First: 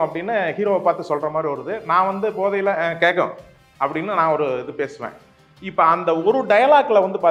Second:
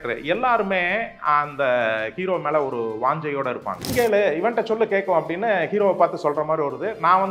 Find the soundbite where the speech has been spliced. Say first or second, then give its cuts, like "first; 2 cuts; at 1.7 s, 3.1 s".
second; 1 cut; at 3.9 s